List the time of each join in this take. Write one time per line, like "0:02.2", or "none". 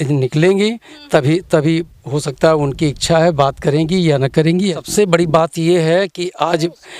0:04.7